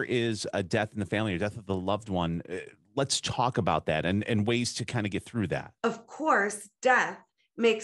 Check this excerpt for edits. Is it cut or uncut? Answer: cut